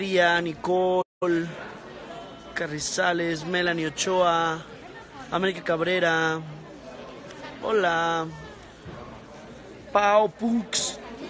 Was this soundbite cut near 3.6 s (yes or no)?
no